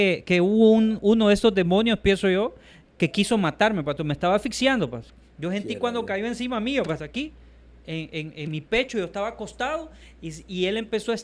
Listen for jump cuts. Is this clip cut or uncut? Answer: uncut